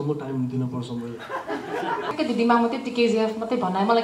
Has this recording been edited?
yes; 1 cut; at 2.1 s

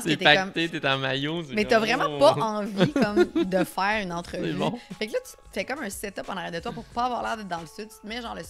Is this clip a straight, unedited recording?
yes; 0 cuts

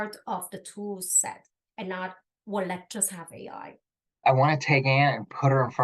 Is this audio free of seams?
no; 1 cut; at 4.2 s

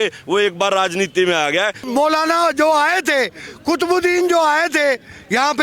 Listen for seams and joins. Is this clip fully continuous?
no; 1 cut; at 1.8 s

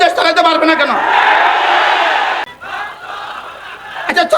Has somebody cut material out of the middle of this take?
yes; 1 cut; at 2.4 s

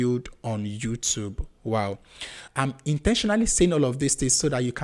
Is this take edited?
yes; 1 cut; at 2.4 s

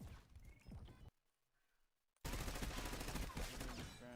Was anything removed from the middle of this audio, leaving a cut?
no; 0 cuts

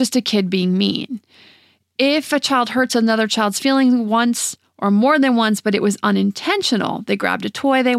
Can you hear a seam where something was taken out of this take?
no; 0 cuts

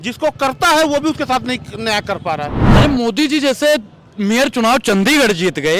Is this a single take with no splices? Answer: no; 1 cut; at 2.6 s

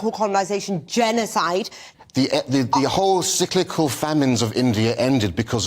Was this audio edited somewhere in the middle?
yes; 1 cut; at 1.8 s

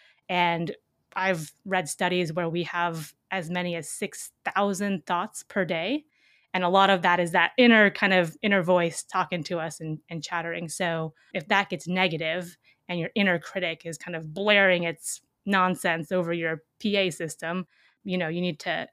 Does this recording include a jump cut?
yes; 2 cuts; at 11.3 s, 17.9 s

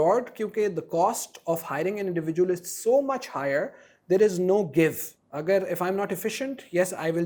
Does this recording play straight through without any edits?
yes; 0 cuts

